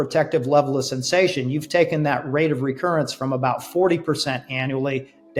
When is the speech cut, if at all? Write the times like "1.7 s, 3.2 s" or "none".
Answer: none